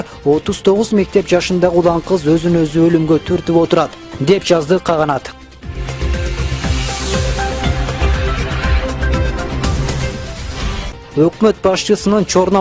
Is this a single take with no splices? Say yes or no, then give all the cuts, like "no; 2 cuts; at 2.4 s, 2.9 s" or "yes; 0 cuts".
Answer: no; 1 cut; at 8.4 s